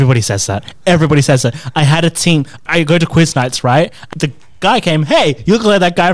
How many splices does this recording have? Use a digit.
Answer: 2